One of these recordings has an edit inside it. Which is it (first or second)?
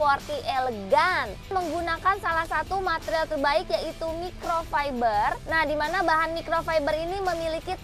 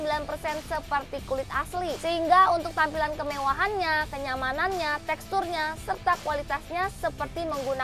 first